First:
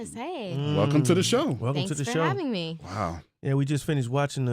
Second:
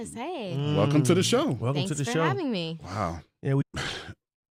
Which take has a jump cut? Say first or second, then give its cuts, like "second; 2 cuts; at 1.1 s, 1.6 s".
first; 1 cut; at 3.6 s